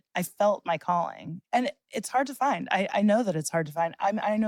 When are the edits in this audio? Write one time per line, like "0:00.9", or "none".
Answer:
none

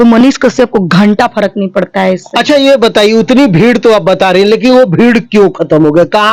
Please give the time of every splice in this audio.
none

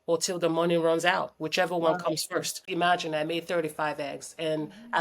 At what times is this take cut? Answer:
0:02.6

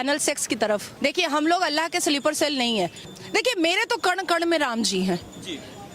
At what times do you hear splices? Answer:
0:00.9
0:03.0

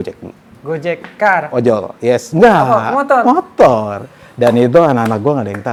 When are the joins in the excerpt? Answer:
none

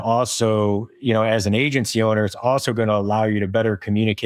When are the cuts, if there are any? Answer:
none

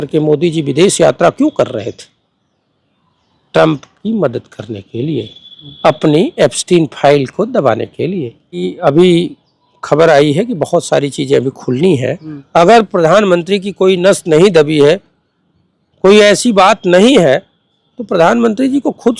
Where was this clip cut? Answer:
0:08.7
0:12.3

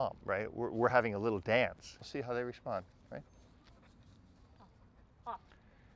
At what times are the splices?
0:02.1

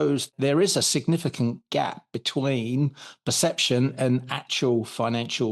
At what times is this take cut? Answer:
none

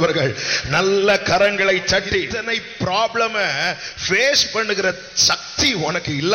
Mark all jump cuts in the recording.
0:02.4

